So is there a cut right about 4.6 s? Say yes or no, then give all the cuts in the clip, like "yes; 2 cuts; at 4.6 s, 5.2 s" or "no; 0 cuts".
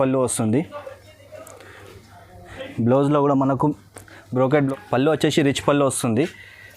yes; 1 cut; at 4.6 s